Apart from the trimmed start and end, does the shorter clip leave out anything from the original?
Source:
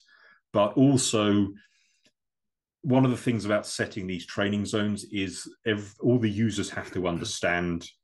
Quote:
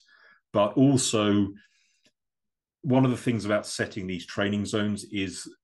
no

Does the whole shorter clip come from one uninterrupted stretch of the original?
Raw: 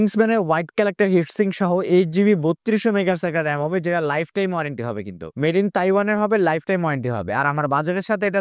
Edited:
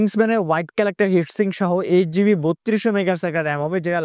yes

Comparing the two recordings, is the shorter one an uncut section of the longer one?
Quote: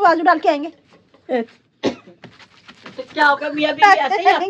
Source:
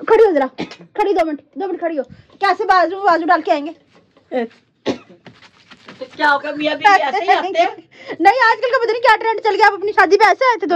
yes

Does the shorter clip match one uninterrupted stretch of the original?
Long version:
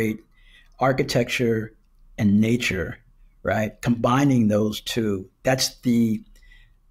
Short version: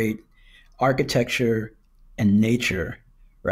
yes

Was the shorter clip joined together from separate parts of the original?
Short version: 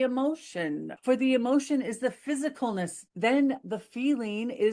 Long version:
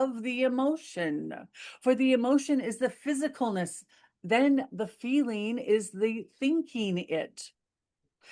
yes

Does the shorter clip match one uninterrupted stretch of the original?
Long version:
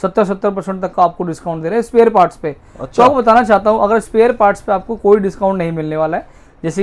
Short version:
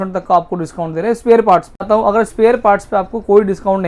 no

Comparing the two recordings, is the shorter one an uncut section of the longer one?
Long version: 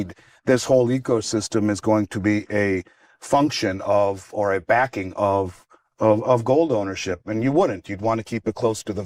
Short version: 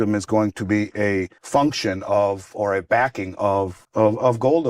no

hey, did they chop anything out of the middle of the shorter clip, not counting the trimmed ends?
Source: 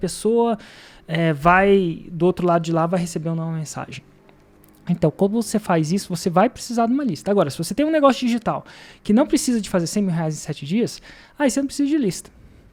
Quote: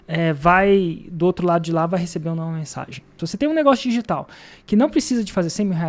yes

